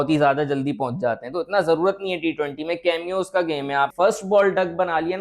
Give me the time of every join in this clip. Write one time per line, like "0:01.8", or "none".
0:03.9